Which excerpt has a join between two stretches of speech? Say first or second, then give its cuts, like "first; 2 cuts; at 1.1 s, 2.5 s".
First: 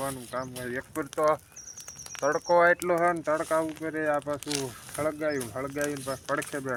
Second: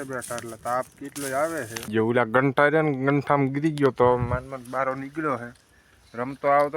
second; 1 cut; at 1.9 s